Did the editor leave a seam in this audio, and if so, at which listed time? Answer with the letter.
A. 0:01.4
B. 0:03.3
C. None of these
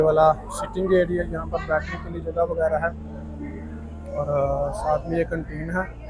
C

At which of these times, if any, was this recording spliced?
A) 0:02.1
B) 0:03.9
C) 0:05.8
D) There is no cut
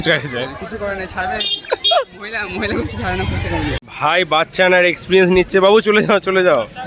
B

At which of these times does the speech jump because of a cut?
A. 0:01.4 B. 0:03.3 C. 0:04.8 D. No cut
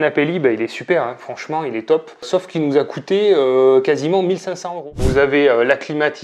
C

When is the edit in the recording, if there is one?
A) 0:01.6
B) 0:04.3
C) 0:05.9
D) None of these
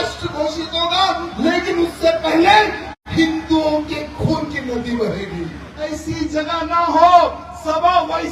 C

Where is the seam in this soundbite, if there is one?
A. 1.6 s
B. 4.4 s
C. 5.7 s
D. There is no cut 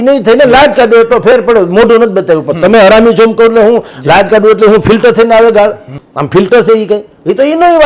D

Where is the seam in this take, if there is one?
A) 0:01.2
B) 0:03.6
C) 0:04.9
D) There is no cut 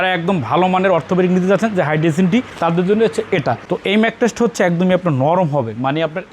B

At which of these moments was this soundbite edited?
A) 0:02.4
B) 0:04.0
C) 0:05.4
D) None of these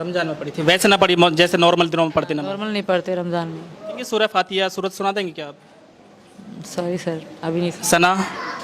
B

